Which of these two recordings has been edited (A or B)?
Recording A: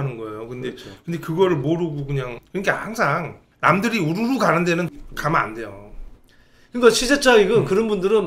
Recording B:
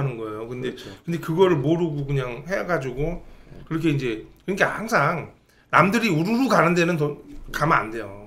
A